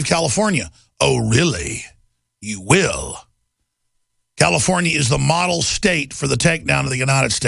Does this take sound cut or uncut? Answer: uncut